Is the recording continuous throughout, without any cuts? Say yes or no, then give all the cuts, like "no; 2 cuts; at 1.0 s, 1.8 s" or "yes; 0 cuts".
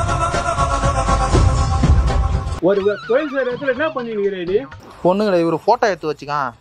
no; 1 cut; at 4.8 s